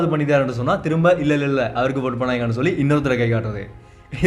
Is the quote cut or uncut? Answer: uncut